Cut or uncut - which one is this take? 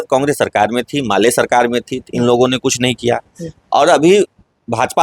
uncut